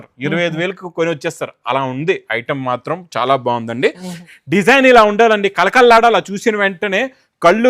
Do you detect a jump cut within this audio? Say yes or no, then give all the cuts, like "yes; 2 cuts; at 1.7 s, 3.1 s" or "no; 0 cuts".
yes; 1 cut; at 4.2 s